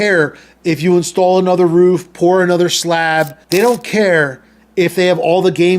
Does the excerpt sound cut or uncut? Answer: cut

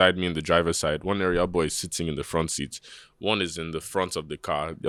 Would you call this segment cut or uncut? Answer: uncut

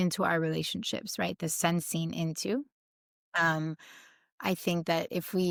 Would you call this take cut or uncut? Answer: uncut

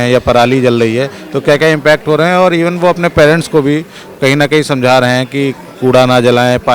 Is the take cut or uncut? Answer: uncut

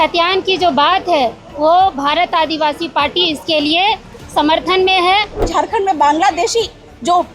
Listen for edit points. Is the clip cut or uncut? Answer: cut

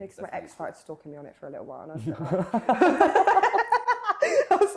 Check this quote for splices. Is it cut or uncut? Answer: uncut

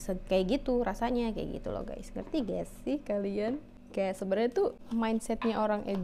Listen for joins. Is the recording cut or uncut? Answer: cut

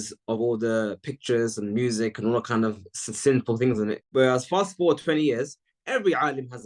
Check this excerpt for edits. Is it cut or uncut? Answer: uncut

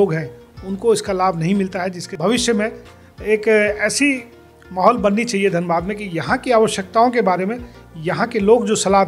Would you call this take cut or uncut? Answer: cut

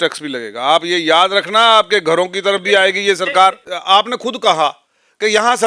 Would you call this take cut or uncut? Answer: cut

